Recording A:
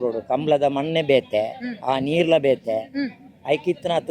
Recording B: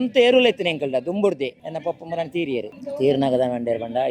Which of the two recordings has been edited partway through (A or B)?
B